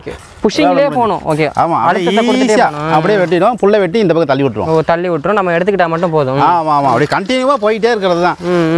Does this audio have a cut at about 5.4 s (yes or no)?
no